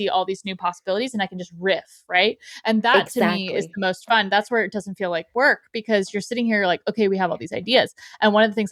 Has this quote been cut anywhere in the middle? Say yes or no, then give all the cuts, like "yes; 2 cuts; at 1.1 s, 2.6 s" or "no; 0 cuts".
no; 0 cuts